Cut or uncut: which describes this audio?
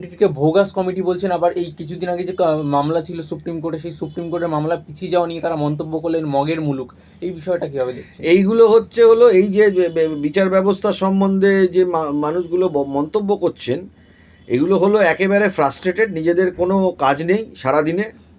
uncut